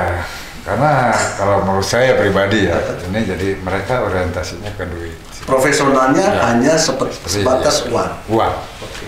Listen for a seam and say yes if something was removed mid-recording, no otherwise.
no